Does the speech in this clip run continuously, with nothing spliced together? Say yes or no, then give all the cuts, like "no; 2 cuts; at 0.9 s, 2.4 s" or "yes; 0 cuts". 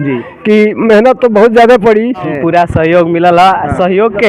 no; 1 cut; at 2.3 s